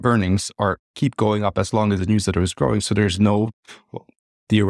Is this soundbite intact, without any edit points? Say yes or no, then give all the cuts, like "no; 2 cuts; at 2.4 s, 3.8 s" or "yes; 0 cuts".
yes; 0 cuts